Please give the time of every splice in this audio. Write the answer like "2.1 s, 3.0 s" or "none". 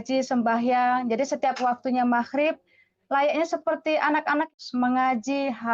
4.5 s